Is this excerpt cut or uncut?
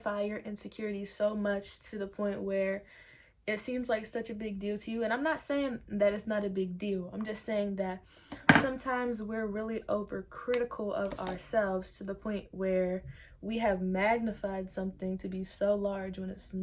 uncut